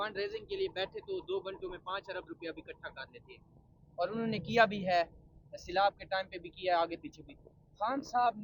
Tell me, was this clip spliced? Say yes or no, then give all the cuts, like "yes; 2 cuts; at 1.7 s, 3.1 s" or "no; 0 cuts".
no; 0 cuts